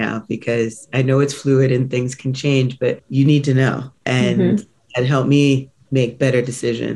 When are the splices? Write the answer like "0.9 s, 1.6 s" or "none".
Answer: 3.0 s